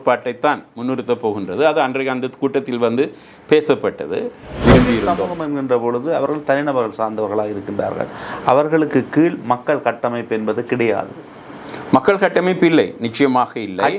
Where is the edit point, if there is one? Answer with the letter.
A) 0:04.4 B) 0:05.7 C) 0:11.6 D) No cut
A